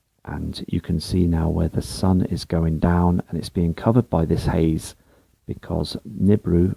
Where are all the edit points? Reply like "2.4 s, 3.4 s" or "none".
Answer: 1.9 s